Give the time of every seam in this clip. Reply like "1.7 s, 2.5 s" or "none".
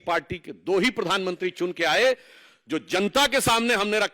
none